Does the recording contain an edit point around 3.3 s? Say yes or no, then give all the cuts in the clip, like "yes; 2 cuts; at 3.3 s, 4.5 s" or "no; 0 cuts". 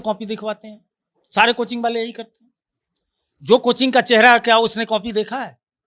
no; 0 cuts